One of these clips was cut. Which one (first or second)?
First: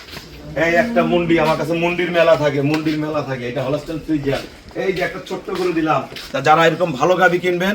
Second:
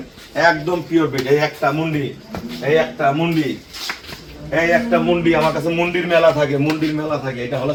first